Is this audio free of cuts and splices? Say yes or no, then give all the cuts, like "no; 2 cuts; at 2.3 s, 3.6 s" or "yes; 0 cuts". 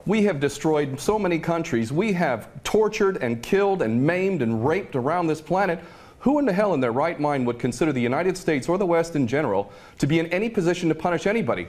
yes; 0 cuts